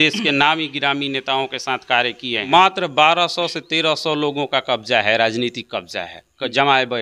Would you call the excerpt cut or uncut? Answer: cut